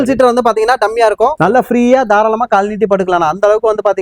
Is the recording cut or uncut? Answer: cut